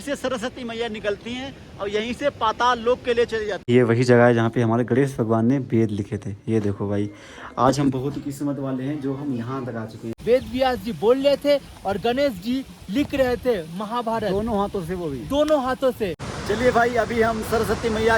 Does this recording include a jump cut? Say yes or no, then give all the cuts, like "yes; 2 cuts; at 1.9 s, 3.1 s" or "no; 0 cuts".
yes; 3 cuts; at 3.6 s, 10.1 s, 16.2 s